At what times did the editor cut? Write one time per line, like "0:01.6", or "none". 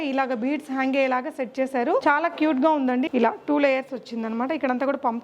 0:02.0
0:03.1